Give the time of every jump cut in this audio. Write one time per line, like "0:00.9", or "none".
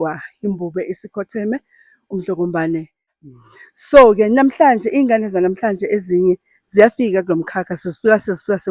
0:03.1